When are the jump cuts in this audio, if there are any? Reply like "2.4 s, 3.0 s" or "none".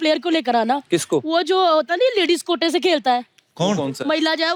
none